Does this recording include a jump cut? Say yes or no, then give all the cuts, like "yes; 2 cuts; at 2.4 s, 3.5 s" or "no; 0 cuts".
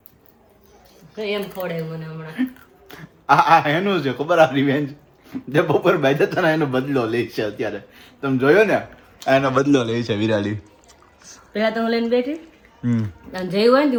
no; 0 cuts